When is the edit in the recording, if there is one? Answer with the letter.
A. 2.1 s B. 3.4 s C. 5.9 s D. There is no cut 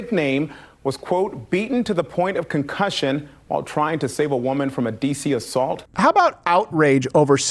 C